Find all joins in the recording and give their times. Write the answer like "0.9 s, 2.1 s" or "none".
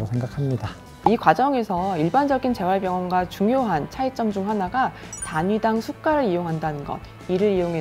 1.0 s